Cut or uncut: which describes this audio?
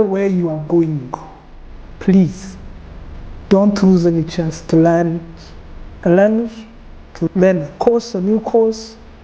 cut